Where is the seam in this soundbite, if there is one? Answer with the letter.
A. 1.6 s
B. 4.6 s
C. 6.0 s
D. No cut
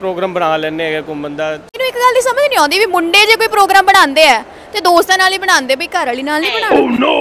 A